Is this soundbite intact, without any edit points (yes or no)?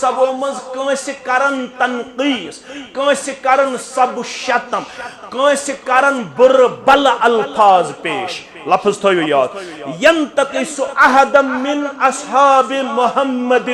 yes